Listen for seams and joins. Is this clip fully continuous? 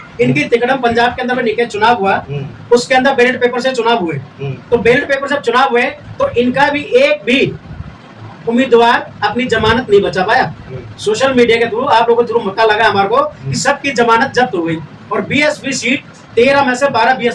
yes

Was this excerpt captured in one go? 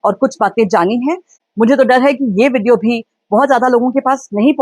no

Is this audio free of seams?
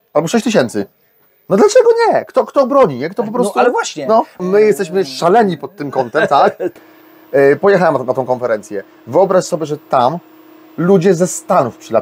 no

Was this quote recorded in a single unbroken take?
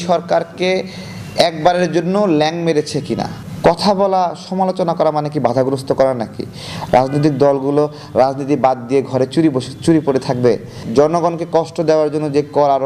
no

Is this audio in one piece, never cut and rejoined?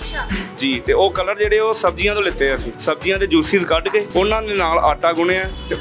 no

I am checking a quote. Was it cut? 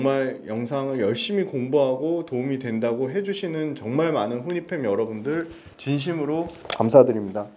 no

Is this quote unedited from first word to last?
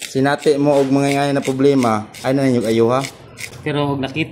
yes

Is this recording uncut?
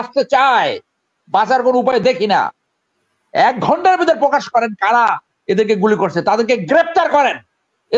yes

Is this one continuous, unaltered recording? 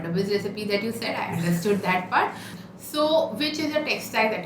no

